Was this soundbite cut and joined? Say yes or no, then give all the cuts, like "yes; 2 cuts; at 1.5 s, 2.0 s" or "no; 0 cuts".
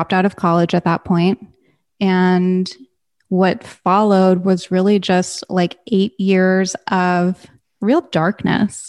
no; 0 cuts